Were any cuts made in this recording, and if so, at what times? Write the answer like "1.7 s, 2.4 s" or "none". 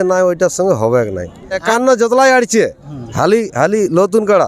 1.6 s